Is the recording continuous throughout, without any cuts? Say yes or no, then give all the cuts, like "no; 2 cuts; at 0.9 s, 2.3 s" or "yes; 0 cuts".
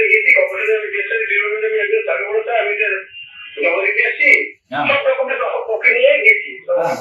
yes; 0 cuts